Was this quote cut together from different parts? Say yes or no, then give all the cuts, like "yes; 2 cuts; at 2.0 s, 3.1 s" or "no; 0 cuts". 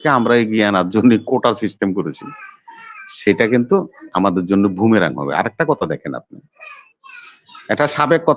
no; 0 cuts